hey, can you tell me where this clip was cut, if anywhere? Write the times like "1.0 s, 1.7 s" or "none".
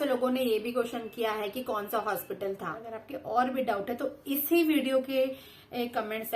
2.8 s